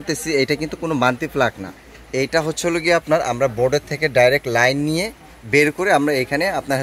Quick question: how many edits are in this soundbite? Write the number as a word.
zero